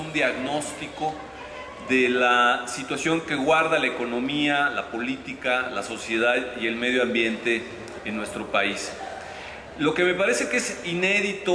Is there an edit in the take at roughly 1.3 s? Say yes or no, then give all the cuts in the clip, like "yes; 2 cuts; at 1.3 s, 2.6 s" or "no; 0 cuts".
no; 0 cuts